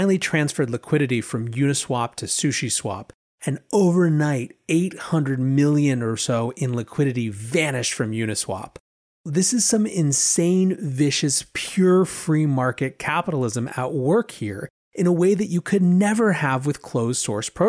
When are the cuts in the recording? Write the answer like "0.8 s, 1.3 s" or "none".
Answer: 9.2 s